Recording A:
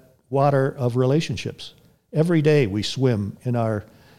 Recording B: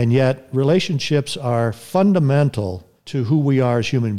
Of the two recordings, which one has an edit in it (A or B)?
B